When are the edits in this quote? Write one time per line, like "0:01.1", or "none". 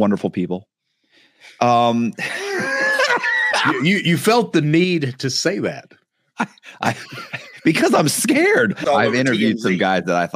0:08.8